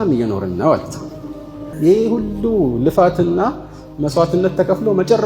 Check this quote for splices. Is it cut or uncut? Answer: cut